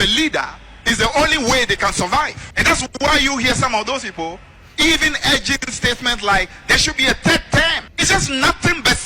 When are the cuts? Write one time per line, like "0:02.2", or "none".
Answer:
0:02.4
0:07.8